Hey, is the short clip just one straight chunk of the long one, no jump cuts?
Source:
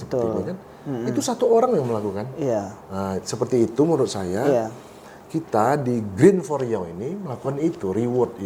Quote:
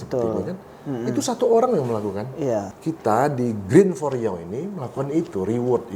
no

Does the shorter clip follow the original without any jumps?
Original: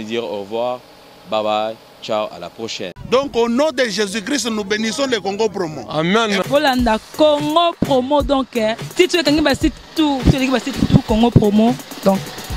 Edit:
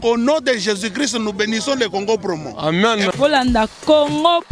yes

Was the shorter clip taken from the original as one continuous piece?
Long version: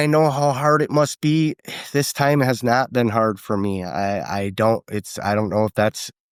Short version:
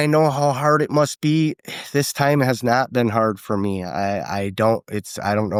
yes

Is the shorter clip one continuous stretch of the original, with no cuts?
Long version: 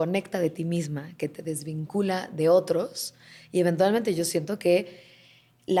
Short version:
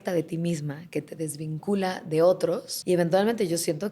no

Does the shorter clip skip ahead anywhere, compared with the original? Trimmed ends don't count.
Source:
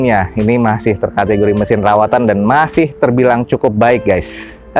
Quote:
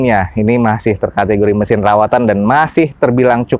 no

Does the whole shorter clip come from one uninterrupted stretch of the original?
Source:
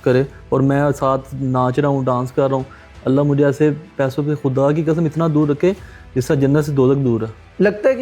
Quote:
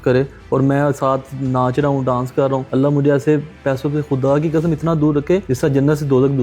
no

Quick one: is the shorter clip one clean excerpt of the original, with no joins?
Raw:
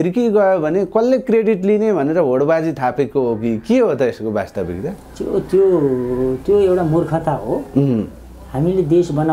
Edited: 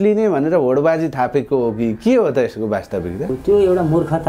no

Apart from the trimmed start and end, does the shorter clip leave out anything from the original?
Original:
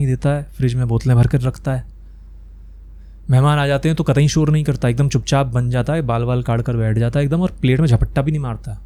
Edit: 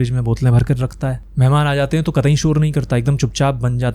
yes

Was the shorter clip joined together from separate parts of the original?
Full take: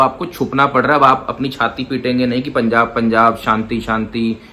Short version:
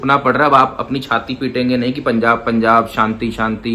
no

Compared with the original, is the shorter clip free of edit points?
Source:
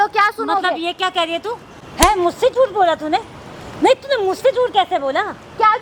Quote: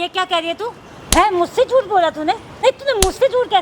no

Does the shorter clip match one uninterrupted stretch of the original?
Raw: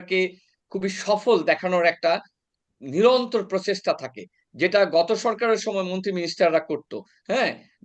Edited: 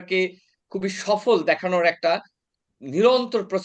yes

